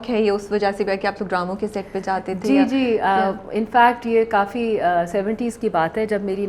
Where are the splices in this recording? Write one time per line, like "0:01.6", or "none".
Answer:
none